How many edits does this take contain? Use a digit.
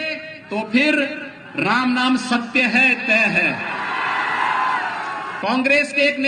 1